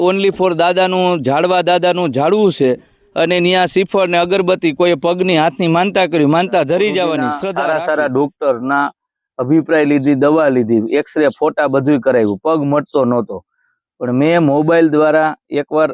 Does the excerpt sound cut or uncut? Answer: cut